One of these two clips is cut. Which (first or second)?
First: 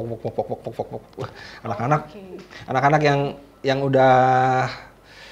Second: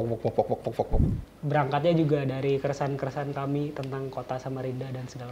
second